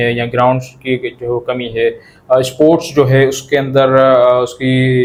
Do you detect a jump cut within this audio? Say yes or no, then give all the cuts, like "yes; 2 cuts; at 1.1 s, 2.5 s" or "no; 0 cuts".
no; 0 cuts